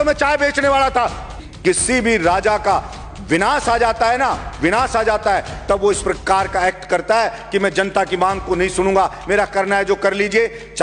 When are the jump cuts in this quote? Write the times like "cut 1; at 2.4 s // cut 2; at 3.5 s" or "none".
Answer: cut 1; at 1.4 s